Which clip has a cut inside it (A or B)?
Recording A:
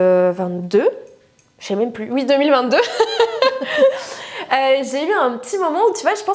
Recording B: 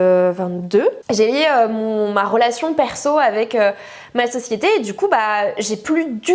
B